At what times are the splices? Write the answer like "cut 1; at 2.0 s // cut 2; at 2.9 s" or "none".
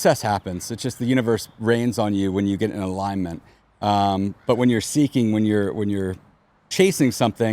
none

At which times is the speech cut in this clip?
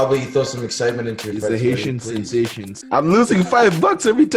cut 1; at 2.7 s

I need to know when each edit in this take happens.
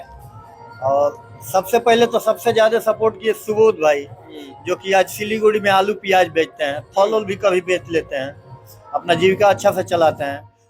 none

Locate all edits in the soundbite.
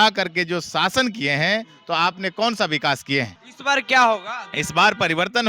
cut 1; at 3.4 s

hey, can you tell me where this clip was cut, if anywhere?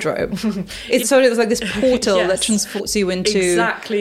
cut 1; at 1.0 s // cut 2; at 2.9 s

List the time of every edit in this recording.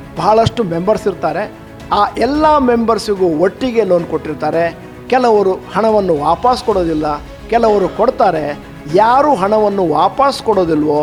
none

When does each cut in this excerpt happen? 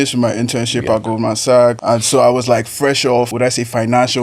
cut 1; at 1.8 s // cut 2; at 3.3 s

